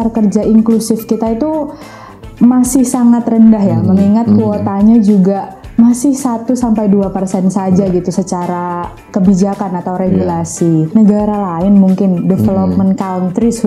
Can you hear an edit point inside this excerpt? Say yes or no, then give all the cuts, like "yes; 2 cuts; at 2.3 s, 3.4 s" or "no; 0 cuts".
yes; 1 cut; at 10.9 s